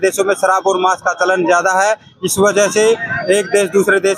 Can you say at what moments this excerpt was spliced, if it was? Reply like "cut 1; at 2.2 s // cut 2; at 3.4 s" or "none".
none